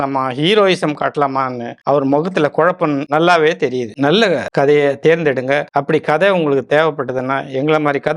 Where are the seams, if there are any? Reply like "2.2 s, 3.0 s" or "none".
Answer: 3.9 s, 5.7 s